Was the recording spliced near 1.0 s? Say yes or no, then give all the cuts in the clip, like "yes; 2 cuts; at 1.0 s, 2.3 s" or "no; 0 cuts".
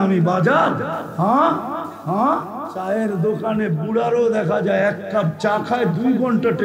yes; 3 cuts; at 1.0 s, 1.9 s, 2.7 s